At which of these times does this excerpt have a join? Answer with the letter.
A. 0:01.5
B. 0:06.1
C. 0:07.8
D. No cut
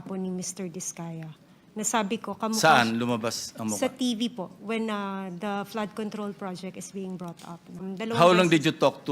C